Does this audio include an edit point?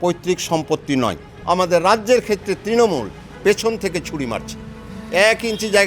yes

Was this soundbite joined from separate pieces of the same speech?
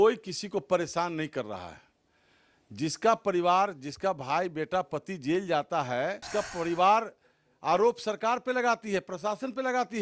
yes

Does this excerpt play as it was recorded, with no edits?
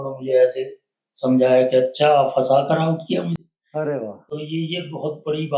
yes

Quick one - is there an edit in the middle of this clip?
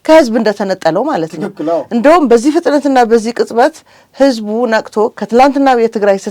no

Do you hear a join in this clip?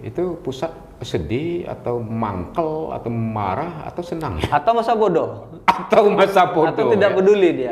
no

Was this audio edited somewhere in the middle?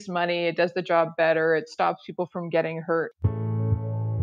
yes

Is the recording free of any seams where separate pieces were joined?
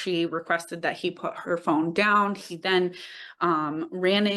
yes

